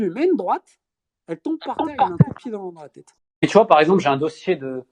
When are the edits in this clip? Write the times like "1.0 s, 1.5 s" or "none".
3.2 s